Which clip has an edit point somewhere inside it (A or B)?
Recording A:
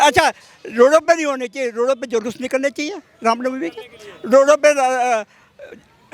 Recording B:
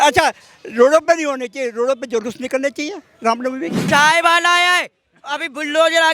B